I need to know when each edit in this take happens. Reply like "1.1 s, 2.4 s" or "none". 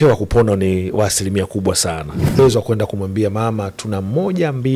2.4 s